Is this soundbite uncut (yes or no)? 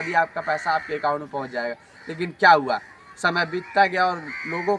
yes